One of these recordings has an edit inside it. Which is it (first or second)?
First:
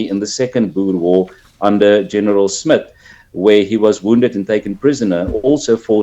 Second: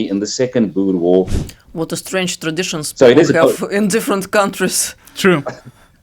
second